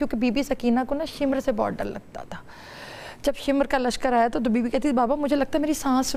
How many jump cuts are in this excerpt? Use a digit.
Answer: 0